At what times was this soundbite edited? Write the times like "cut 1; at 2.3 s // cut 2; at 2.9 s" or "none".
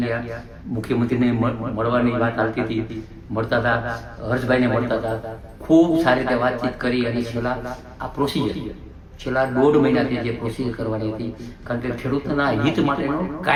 none